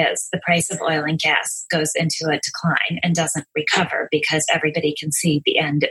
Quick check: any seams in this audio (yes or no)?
no